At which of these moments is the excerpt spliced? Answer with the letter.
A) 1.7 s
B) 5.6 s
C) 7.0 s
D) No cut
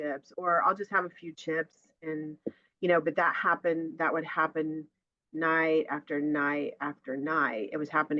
D